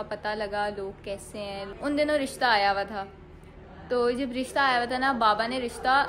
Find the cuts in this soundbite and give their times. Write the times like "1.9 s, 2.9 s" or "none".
1.6 s